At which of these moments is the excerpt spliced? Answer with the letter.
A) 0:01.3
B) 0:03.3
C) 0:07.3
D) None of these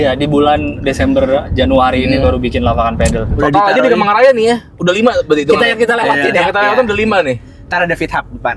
B